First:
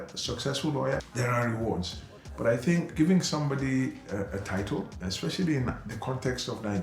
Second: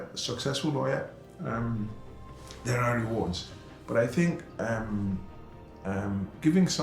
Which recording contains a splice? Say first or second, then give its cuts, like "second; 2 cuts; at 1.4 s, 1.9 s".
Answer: first; 3 cuts; at 1.1 s, 2.9 s, 5.0 s